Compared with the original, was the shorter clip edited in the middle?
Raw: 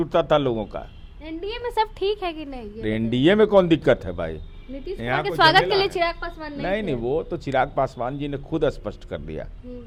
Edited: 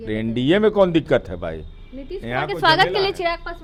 no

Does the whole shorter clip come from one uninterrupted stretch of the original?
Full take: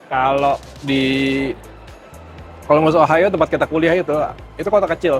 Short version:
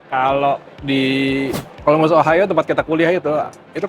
no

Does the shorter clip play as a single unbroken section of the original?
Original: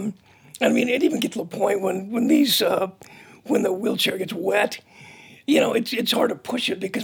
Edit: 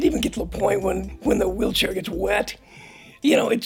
no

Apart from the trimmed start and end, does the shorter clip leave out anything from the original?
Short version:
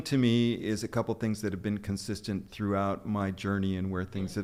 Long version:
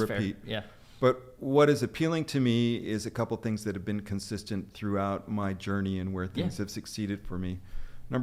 no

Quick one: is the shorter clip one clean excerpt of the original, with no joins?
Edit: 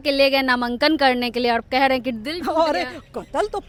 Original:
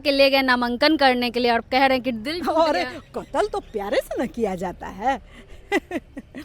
yes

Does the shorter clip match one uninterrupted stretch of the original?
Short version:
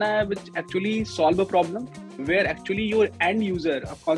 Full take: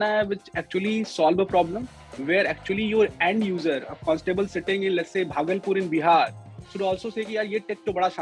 yes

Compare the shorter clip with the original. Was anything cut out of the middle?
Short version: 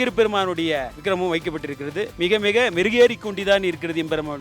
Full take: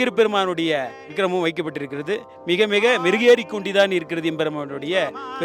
yes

